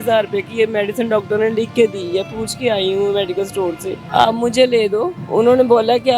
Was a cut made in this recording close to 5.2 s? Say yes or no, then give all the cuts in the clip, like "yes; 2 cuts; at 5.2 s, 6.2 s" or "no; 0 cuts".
yes; 2 cuts; at 3.9 s, 5.2 s